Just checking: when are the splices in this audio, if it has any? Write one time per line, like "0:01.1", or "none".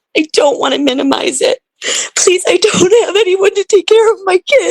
0:01.7